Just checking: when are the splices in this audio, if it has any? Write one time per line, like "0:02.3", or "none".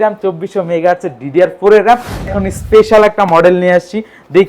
0:02.3